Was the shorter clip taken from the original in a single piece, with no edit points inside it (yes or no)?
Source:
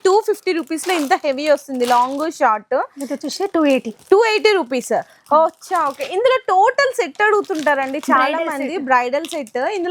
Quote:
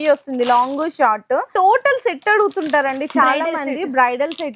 no